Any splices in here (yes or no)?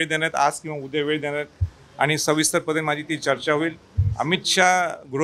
no